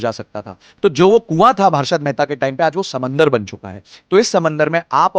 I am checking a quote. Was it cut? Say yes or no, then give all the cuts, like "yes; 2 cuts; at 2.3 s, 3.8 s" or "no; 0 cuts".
no; 0 cuts